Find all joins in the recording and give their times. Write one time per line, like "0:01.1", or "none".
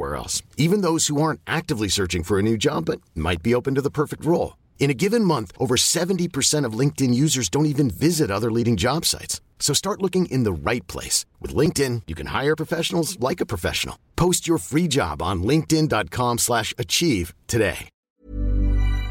0:17.9